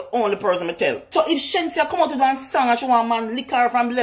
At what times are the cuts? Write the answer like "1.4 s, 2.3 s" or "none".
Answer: 1.0 s